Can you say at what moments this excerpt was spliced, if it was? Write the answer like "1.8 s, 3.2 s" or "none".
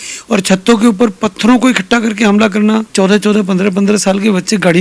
2.9 s